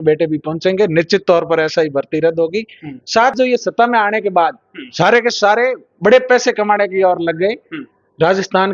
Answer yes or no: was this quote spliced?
yes